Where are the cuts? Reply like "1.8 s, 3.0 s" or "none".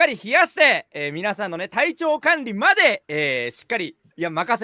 none